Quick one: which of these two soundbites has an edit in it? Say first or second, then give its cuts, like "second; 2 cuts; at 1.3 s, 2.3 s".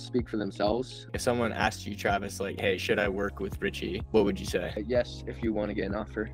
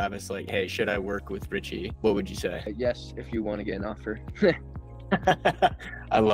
first; 1 cut; at 1.1 s